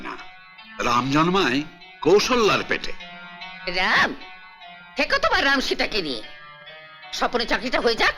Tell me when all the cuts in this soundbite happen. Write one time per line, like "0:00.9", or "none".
none

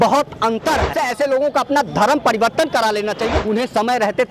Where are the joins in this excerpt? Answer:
0:00.9
0:03.3

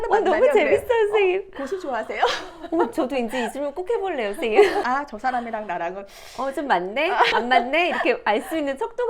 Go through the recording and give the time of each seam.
0:04.8
0:07.3

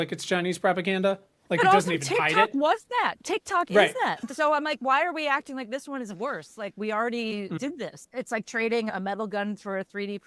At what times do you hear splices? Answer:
0:08.0
0:08.9

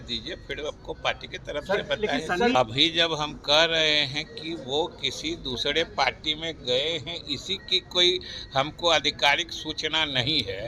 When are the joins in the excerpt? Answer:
0:02.5

